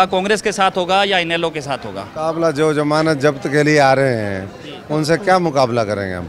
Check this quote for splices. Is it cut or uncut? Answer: uncut